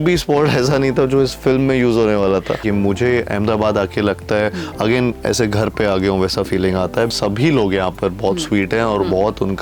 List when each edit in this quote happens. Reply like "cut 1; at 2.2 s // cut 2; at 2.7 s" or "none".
cut 1; at 2.6 s // cut 2; at 7.1 s